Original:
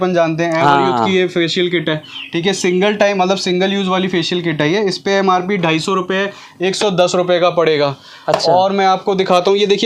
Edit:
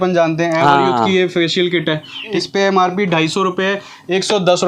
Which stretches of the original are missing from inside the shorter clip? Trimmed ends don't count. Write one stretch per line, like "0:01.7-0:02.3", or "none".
0:02.4-0:04.9